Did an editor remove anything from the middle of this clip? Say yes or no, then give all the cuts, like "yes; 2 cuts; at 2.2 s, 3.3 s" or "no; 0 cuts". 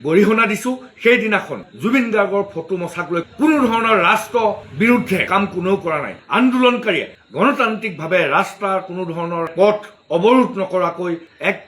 yes; 2 cuts; at 3.3 s, 6.2 s